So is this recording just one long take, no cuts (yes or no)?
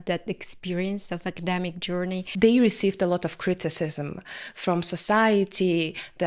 no